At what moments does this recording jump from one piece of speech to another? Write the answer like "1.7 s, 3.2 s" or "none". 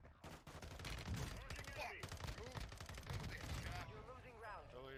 none